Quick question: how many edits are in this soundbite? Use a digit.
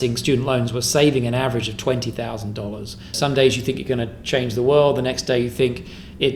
1